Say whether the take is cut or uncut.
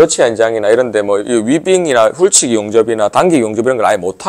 uncut